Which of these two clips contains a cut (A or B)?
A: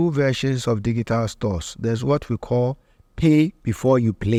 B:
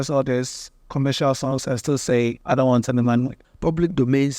B